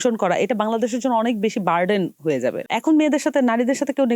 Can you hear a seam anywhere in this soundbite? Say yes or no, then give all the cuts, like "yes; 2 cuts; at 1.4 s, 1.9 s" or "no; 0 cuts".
yes; 1 cut; at 2.7 s